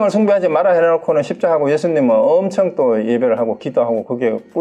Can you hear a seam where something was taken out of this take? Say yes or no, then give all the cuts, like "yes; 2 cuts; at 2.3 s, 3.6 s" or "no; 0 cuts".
no; 0 cuts